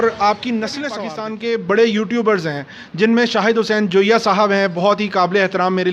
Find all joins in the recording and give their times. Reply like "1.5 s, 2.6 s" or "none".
0.9 s